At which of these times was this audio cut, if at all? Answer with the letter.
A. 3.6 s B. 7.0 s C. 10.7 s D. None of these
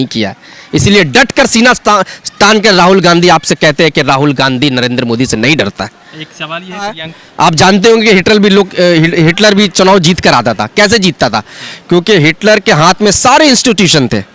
B